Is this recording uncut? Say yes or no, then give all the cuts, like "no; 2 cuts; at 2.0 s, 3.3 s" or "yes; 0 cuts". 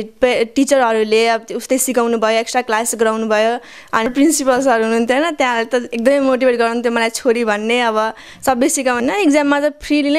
no; 2 cuts; at 4.1 s, 9.0 s